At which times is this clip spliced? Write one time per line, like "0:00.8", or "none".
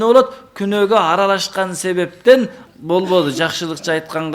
0:02.6